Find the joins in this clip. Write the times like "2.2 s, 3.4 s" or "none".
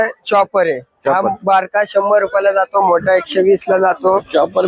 none

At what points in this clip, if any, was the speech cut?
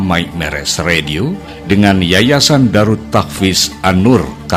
none

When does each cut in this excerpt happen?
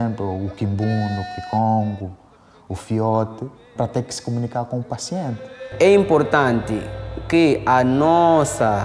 3.7 s, 5.7 s

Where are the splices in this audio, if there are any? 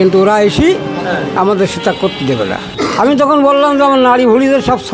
2.6 s

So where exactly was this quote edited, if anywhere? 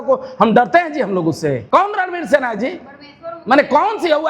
1.6 s

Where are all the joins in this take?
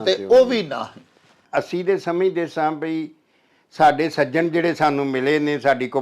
1.3 s

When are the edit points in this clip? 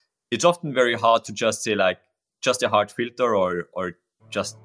none

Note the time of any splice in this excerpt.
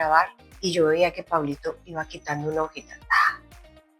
none

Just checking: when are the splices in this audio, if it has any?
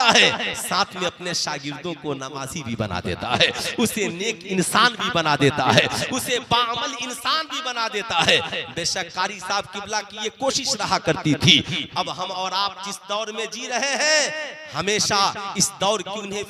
none

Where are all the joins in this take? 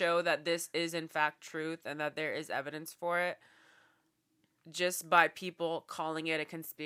none

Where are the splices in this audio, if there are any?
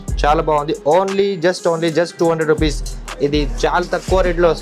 3.0 s

